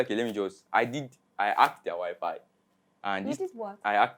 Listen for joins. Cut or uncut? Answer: uncut